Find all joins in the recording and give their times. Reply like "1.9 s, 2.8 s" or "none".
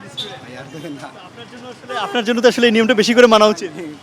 none